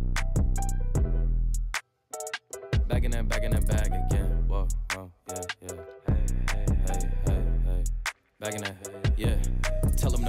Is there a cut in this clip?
no; 0 cuts

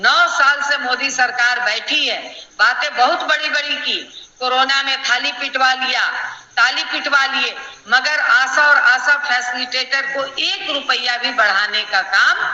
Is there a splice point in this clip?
no; 0 cuts

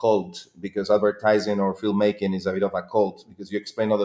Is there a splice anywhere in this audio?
no; 0 cuts

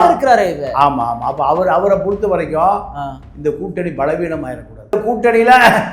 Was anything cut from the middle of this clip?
yes; 1 cut; at 5.0 s

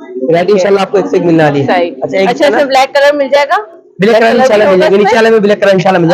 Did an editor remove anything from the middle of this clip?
no; 0 cuts

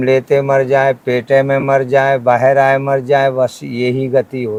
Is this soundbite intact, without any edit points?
yes; 0 cuts

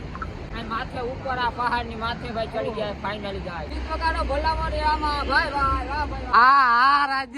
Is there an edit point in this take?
yes; 2 cuts; at 3.7 s, 6.3 s

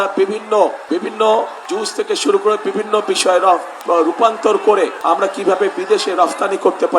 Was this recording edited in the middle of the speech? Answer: yes; 4 cuts; at 0.8 s, 1.6 s, 3.7 s, 5.0 s

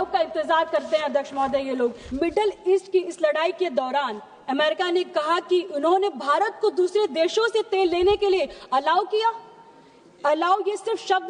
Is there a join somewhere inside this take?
yes; 1 cut; at 2.0 s

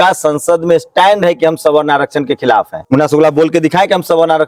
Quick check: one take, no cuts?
yes; 0 cuts

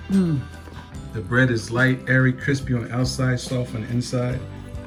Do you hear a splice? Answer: no; 0 cuts

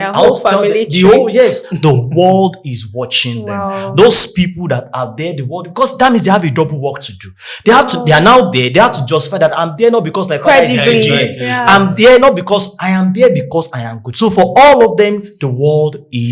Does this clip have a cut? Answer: no; 0 cuts

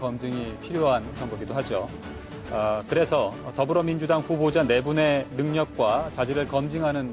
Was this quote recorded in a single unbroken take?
yes; 0 cuts

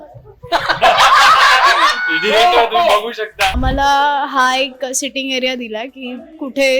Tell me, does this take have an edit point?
yes; 1 cut; at 3.5 s

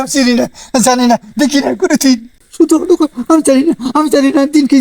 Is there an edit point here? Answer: yes; 1 cut; at 2.4 s

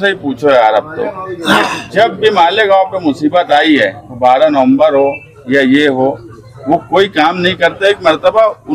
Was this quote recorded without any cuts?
yes; 0 cuts

